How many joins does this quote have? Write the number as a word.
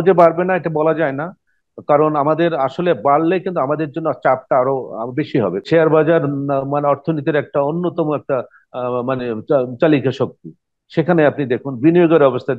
one